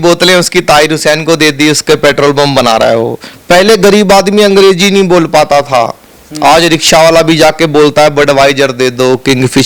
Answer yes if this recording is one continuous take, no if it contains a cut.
no